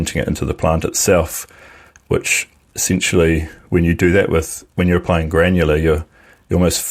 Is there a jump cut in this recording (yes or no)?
no